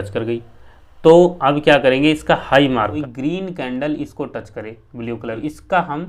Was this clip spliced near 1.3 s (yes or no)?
no